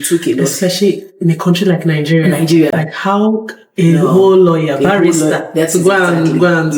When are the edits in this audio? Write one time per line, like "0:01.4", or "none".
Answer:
none